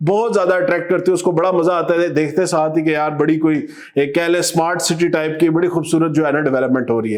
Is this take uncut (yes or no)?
yes